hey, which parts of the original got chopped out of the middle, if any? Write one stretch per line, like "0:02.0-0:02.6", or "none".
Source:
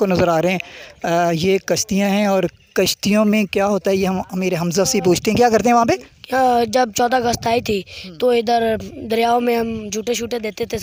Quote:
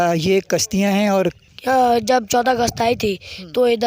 0:02.6-0:06.1